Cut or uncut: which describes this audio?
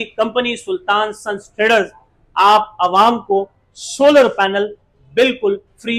uncut